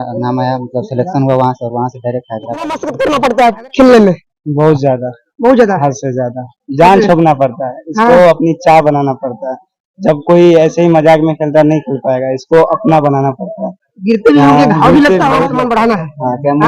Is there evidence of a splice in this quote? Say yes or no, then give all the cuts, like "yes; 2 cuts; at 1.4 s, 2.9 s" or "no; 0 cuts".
yes; 2 cuts; at 2.9 s, 15.5 s